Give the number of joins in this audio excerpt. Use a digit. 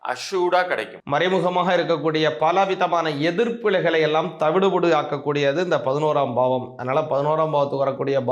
1